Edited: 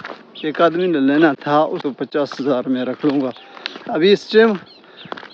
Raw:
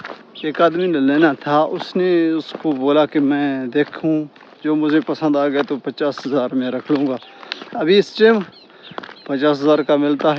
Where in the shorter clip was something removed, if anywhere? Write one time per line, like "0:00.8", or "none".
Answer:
0:01.9